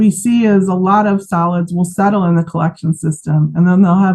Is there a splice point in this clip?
no; 0 cuts

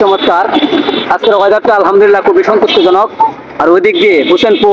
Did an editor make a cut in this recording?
no; 0 cuts

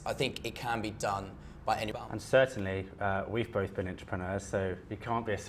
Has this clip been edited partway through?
yes; 1 cut; at 1.9 s

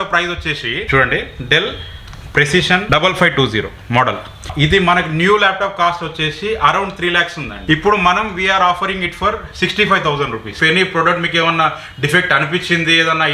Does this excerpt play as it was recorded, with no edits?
no; 5 cuts; at 0.8 s, 2.8 s, 4.5 s, 7.5 s, 10.5 s

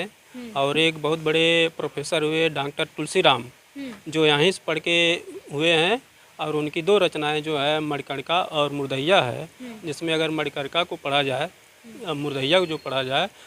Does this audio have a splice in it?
no; 0 cuts

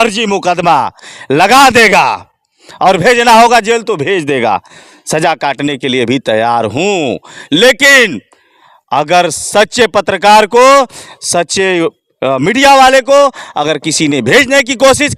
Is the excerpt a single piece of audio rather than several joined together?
yes; 0 cuts

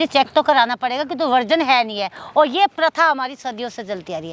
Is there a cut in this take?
no; 0 cuts

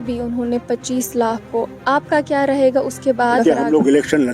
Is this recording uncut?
no; 1 cut; at 3.4 s

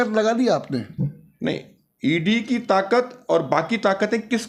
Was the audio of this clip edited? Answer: no; 0 cuts

